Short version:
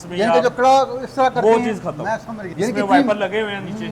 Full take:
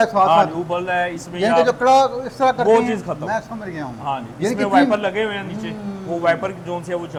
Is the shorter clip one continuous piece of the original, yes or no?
no